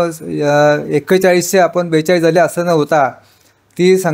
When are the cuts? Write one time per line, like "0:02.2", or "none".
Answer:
none